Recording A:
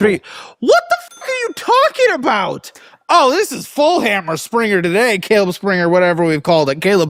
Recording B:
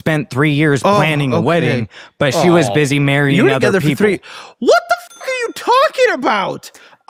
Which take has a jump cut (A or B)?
A